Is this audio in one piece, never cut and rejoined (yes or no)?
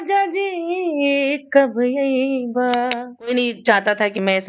no